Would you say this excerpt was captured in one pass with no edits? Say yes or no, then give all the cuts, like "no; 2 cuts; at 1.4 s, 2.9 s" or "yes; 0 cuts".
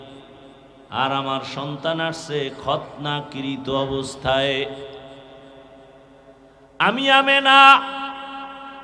yes; 0 cuts